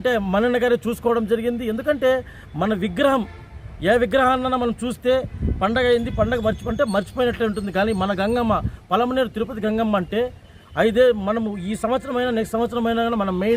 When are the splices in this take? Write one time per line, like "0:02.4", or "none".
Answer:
none

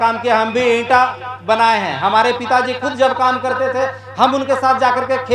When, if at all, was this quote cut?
none

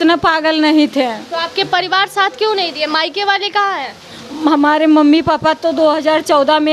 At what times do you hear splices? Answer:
none

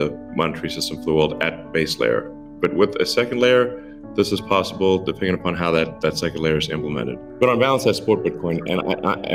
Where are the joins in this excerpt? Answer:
none

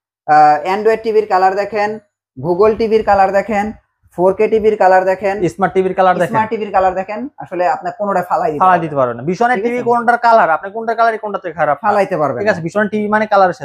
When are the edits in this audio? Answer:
none

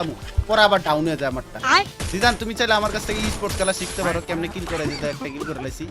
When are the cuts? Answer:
0:01.7

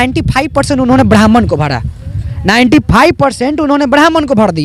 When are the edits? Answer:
none

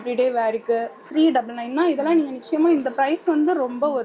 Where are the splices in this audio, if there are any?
0:01.0

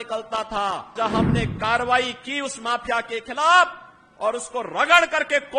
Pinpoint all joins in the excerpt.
0:00.9

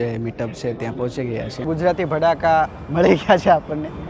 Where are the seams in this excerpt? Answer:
0:01.7

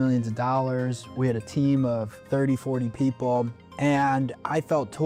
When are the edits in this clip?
none

